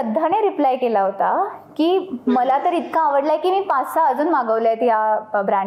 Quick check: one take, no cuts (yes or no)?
yes